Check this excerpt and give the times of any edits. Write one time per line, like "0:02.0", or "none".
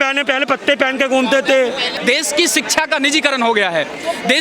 0:01.9